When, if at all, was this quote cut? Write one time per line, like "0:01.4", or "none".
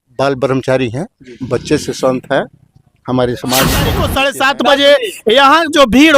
0:04.0